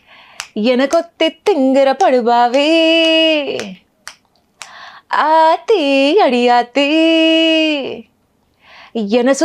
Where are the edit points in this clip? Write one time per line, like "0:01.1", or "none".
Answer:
none